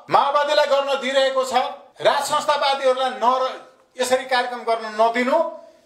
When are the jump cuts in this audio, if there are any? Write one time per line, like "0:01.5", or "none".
none